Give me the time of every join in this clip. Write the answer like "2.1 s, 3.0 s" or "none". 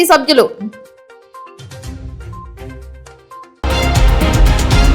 3.6 s